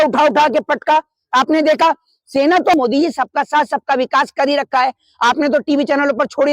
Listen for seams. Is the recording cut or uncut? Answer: cut